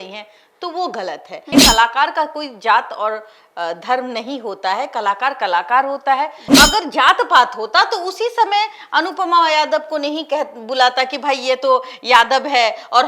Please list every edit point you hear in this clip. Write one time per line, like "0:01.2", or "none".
0:01.5
0:06.5